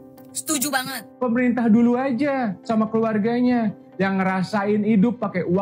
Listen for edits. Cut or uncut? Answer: cut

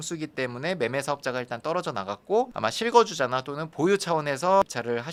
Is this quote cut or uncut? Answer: uncut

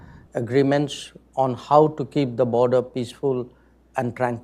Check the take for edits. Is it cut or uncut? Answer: uncut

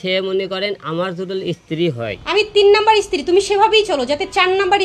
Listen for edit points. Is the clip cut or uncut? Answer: cut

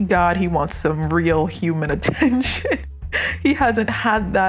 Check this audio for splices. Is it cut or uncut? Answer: uncut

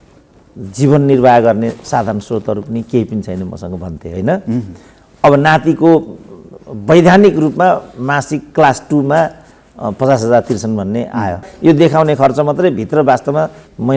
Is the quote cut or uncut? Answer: cut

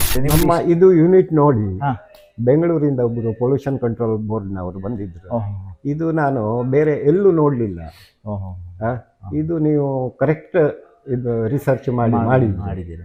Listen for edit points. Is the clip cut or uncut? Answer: uncut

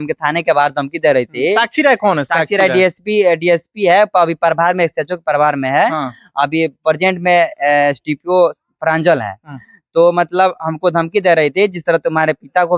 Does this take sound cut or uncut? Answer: uncut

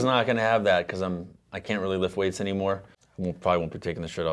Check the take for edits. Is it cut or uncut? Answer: cut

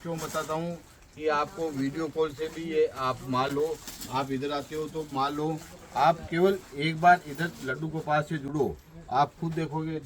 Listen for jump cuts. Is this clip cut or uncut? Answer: uncut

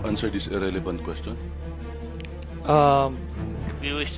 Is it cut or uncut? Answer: uncut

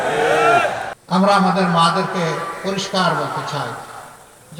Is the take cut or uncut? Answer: cut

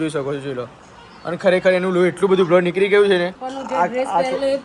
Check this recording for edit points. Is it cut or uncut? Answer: cut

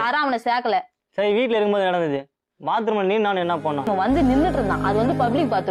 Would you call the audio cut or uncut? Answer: uncut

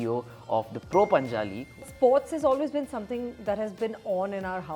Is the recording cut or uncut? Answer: cut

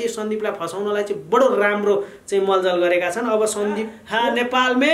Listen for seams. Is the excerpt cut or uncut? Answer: cut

